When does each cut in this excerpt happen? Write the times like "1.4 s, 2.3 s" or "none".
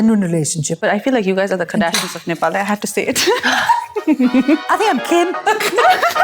0.8 s, 4.7 s